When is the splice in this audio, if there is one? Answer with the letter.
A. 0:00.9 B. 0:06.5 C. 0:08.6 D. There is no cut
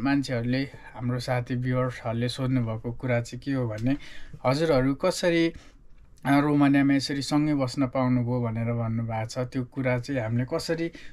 D